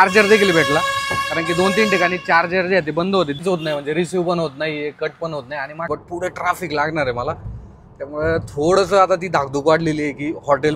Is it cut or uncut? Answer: cut